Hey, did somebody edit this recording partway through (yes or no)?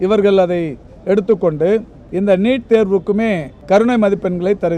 yes